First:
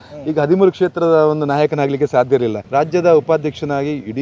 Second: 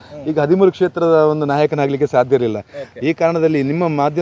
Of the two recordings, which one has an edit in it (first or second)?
first